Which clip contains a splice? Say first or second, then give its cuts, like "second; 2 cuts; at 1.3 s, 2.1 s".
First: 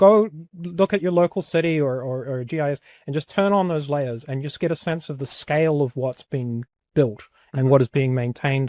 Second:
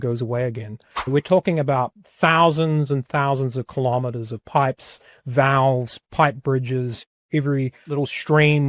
second; 4 cuts; at 1.1 s, 2.0 s, 7.1 s, 7.8 s